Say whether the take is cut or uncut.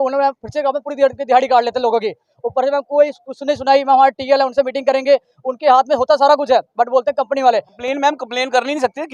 cut